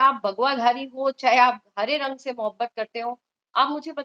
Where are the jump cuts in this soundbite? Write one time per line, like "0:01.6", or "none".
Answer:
none